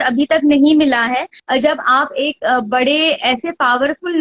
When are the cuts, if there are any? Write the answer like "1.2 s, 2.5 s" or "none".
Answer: 1.3 s